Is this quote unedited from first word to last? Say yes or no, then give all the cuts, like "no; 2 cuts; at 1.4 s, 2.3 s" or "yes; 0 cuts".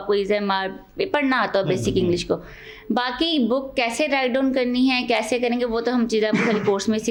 yes; 0 cuts